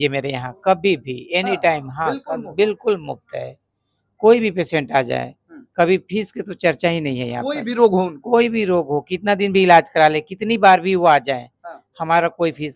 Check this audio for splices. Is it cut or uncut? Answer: uncut